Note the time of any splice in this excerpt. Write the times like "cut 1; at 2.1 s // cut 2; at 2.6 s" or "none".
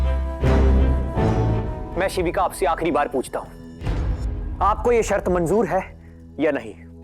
cut 1; at 1.8 s